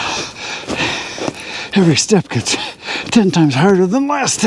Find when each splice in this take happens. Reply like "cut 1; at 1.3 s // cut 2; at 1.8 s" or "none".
none